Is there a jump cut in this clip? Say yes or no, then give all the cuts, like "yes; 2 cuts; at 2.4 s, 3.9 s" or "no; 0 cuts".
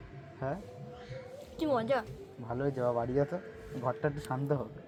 no; 0 cuts